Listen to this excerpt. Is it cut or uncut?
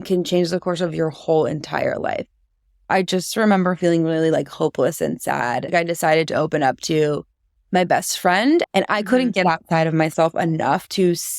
cut